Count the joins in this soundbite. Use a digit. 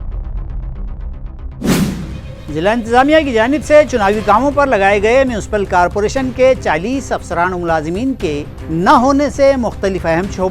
1